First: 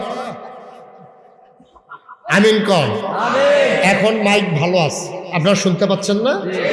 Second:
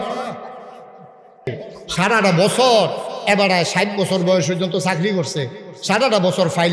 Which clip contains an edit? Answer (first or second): second